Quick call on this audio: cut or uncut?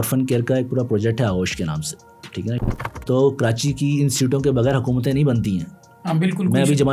cut